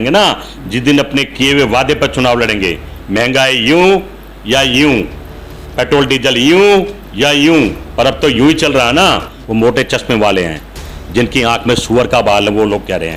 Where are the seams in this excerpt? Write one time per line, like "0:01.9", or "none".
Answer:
0:09.3